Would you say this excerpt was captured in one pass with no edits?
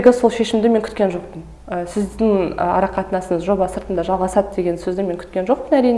yes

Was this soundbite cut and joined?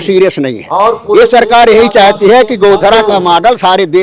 no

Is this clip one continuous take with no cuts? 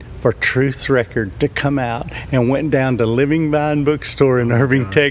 yes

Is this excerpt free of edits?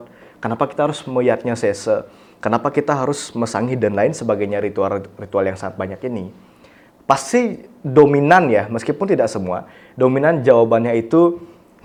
yes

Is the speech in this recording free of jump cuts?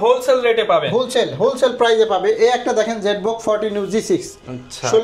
yes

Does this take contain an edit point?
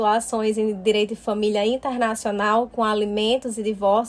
no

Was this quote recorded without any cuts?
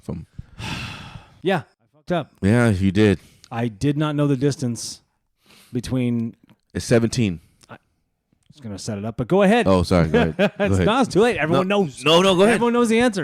no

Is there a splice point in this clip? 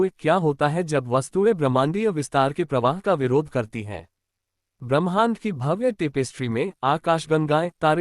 yes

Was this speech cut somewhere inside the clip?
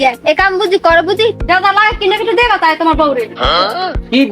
yes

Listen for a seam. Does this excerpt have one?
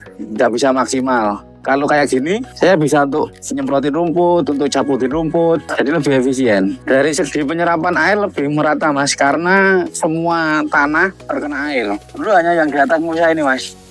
yes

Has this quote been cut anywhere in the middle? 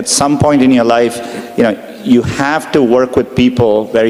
no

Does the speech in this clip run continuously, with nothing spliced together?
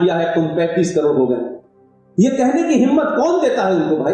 yes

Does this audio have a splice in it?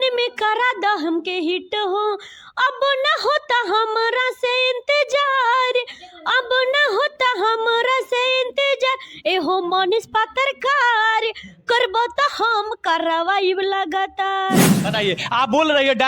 yes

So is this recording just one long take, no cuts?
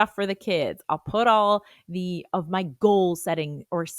yes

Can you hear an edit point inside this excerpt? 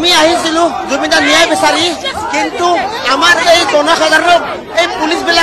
no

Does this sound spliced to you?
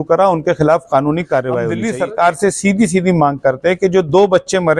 yes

